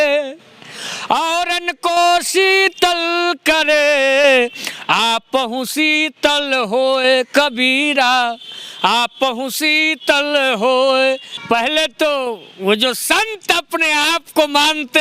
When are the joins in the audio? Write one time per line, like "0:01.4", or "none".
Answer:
0:11.3

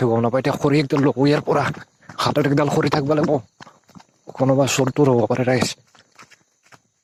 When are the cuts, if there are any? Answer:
none

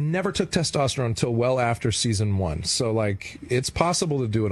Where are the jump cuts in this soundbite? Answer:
none

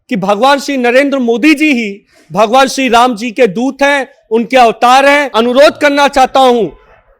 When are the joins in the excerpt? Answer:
0:05.3

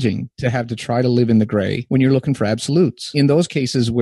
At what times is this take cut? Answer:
0:01.8
0:03.1

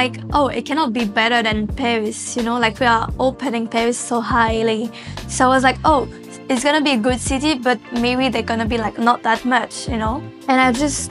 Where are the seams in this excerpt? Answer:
none

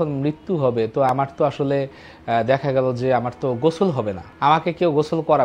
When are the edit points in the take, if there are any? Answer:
none

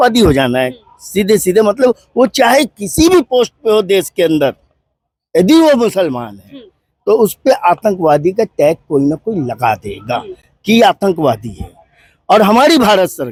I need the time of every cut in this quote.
none

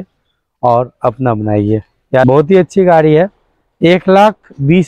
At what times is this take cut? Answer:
0:02.2

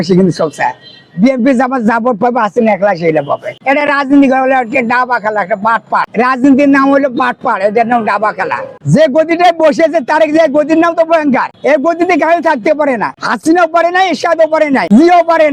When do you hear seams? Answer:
0:03.6
0:08.8

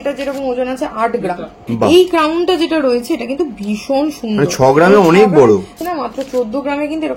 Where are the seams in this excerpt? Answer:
0:01.6
0:05.8

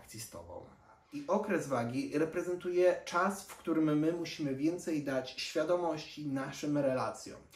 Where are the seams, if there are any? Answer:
0:01.1

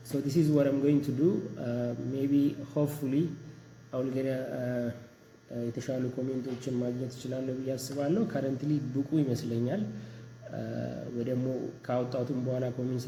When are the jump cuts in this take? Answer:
none

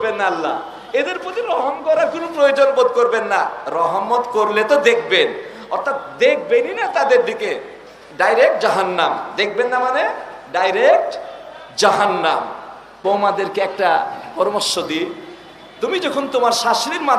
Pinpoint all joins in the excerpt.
0:13.0

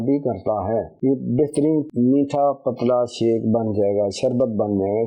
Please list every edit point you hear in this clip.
0:00.9

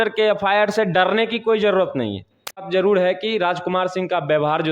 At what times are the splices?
0:02.7

